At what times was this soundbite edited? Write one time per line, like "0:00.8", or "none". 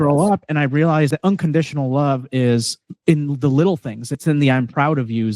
0:01.1
0:04.2